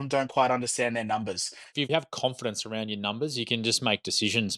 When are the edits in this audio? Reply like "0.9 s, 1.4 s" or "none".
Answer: 1.8 s